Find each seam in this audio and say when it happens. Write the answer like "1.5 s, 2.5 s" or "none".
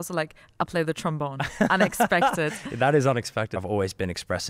3.6 s